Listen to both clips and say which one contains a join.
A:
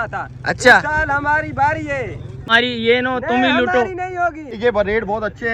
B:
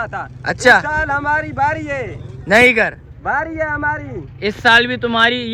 A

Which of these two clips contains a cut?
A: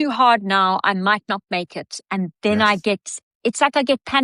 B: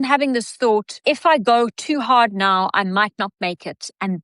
B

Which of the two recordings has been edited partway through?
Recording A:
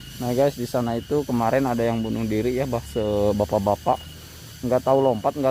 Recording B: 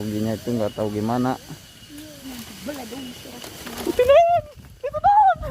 B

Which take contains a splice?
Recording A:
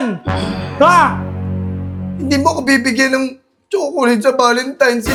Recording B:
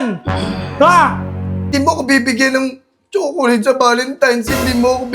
B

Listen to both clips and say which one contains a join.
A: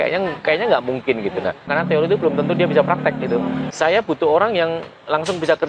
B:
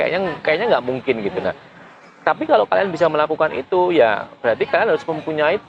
A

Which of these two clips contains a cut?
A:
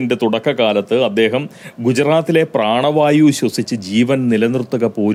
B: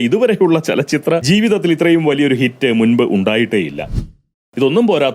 B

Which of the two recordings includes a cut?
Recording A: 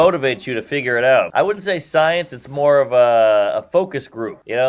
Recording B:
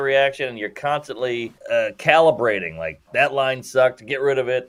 A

